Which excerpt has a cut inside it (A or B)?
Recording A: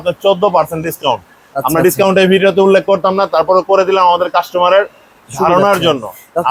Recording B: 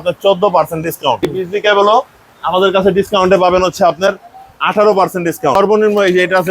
B